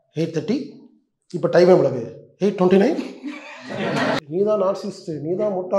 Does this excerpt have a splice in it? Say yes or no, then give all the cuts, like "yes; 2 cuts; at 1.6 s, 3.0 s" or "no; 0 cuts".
yes; 1 cut; at 4.2 s